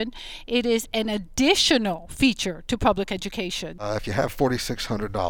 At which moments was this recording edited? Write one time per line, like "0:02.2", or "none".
0:03.8